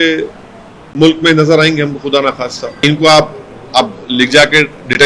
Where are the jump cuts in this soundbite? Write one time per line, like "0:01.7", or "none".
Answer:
0:02.8